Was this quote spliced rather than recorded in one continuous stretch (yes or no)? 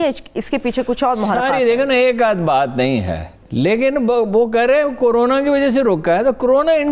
yes